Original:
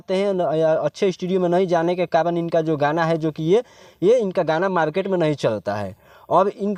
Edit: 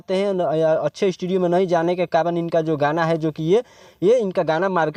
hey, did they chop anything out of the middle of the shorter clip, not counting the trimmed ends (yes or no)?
no